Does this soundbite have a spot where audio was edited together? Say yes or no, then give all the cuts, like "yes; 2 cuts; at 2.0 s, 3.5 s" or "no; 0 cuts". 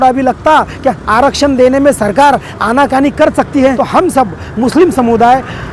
yes; 1 cut; at 3.8 s